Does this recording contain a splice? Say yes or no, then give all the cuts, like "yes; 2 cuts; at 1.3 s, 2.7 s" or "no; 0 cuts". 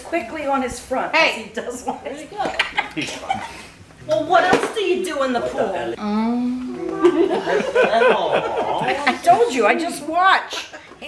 no; 0 cuts